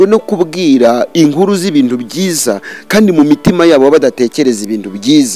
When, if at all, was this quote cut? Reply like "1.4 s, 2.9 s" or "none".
none